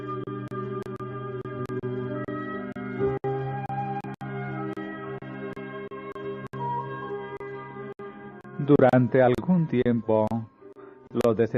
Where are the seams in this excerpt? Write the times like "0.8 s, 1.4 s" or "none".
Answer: 4.0 s